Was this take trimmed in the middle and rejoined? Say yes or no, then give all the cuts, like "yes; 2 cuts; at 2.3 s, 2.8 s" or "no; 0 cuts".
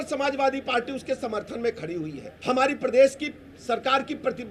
yes; 1 cut; at 2.2 s